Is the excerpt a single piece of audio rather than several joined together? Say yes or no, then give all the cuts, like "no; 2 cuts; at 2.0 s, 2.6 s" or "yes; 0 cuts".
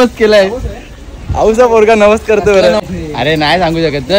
no; 1 cut; at 2.8 s